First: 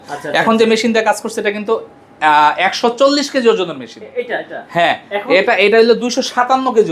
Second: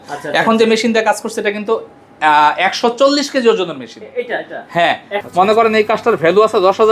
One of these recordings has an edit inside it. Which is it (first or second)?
second